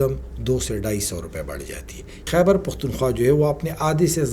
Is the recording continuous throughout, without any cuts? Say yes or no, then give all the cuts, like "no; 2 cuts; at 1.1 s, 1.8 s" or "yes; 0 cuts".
no; 1 cut; at 2.3 s